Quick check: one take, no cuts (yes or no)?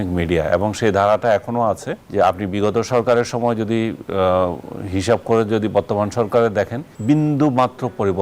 no